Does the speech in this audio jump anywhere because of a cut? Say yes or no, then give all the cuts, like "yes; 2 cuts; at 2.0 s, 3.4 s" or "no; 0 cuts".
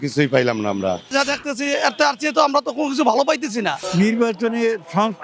yes; 2 cuts; at 1.1 s, 3.8 s